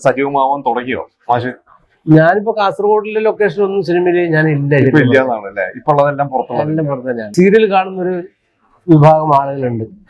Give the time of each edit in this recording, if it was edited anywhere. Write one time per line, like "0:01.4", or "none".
0:07.3